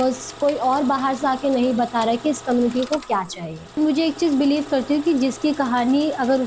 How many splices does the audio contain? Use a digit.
1